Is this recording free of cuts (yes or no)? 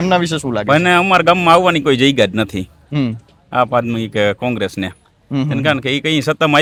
yes